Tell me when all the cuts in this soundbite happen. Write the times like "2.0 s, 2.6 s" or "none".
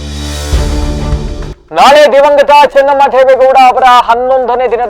1.5 s